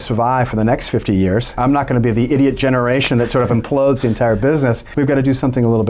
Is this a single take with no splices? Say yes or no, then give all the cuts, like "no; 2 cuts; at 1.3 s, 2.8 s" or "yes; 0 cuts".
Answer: no; 2 cuts; at 1.6 s, 4.8 s